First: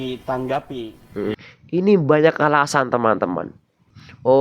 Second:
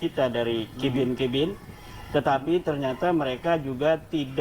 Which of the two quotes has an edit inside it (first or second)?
first